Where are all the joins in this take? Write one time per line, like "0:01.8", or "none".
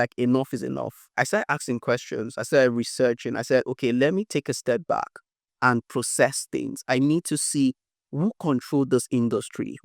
0:01.0